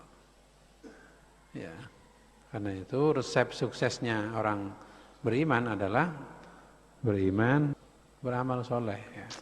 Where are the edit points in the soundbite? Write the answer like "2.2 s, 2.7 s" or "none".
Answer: 7.8 s